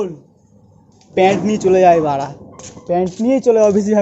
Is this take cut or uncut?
cut